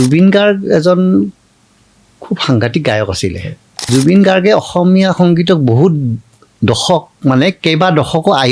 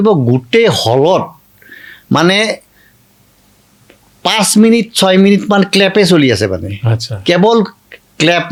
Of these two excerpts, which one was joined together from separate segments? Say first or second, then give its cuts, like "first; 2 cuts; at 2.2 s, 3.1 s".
first; 1 cut; at 3.9 s